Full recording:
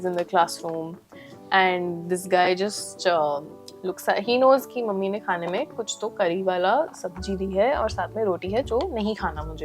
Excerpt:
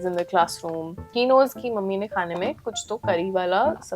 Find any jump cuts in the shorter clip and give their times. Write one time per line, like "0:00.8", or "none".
0:01.1